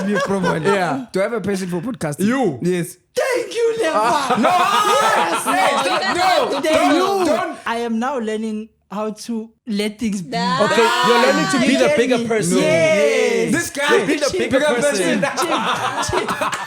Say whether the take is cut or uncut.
cut